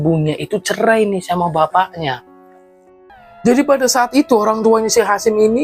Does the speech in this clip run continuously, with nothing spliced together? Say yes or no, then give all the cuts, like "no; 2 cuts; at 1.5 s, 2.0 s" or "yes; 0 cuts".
no; 1 cut; at 3.0 s